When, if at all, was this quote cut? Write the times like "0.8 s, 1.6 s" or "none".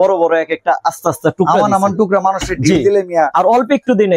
none